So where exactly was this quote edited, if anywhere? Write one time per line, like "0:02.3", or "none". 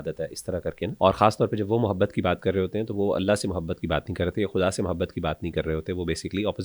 0:00.9